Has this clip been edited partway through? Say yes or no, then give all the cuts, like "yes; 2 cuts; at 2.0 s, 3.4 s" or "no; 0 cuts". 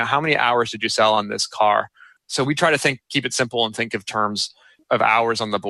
yes; 1 cut; at 4.8 s